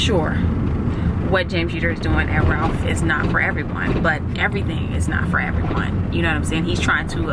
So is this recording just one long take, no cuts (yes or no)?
yes